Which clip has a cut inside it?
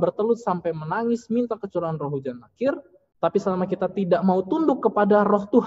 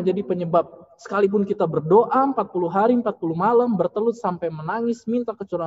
first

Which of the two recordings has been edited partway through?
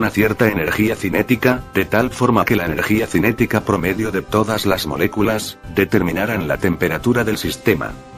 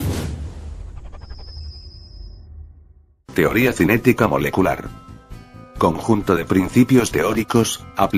first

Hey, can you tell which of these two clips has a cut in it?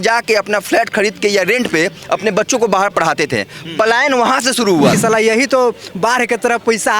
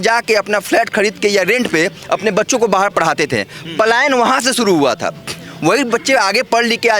first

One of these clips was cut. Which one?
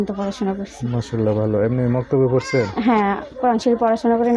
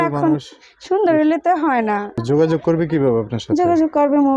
second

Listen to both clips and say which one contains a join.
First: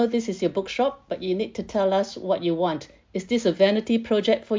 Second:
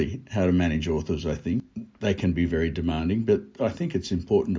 second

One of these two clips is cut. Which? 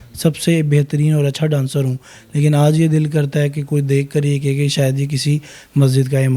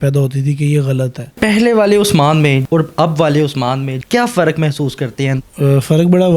second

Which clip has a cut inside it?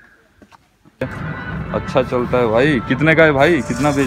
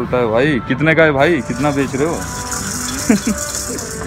first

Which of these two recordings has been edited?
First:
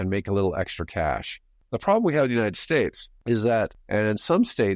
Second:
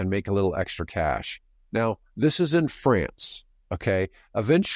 first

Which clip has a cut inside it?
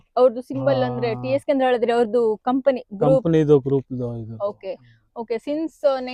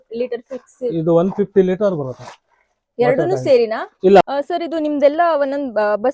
second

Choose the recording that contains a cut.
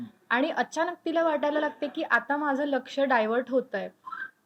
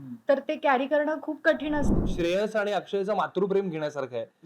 second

